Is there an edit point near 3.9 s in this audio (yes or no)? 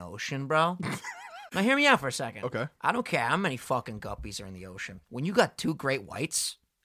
no